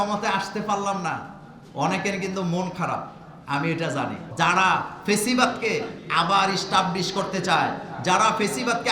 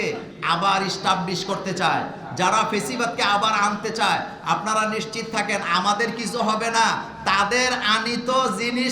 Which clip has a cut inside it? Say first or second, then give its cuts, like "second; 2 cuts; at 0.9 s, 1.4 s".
first; 1 cut; at 4.2 s